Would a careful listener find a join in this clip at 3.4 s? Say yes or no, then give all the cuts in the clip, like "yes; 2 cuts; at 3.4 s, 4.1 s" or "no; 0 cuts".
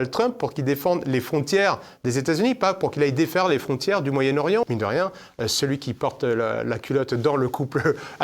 no; 1 cut; at 4.6 s